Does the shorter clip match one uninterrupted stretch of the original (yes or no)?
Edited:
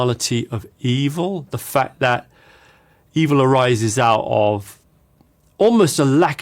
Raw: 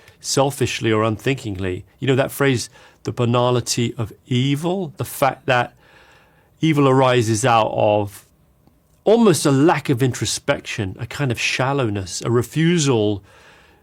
yes